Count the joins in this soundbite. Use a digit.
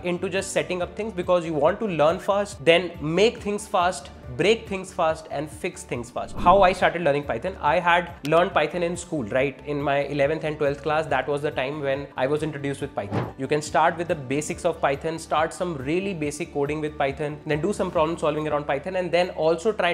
6